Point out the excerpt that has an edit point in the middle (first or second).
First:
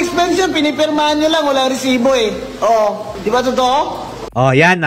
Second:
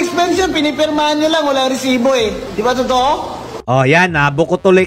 second